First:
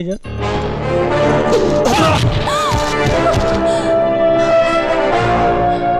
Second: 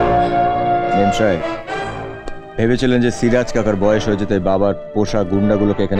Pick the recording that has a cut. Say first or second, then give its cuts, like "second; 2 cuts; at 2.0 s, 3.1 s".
first; 1 cut; at 1.1 s